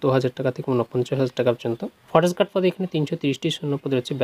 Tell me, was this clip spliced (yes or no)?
yes